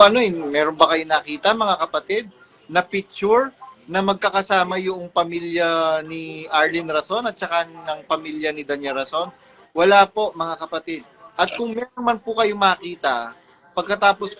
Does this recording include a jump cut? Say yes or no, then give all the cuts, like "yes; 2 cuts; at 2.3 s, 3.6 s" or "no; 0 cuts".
no; 0 cuts